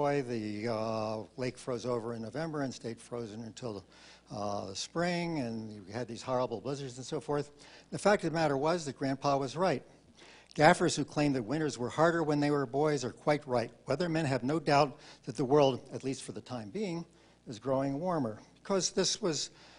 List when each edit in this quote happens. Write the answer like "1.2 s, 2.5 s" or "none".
11.8 s